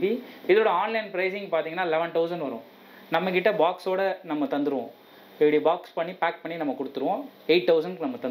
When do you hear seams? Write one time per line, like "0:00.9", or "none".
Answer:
none

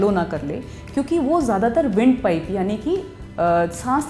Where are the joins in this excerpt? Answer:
none

